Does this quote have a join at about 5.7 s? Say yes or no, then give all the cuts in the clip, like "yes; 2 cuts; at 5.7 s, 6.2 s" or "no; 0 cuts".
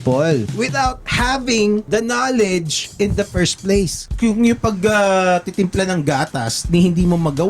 no; 4 cuts; at 0.7 s, 1.8 s, 2.8 s, 4.1 s